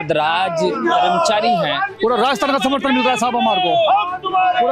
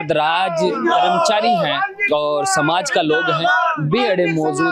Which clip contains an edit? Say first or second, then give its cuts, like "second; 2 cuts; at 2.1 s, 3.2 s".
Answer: first; 1 cut; at 1.9 s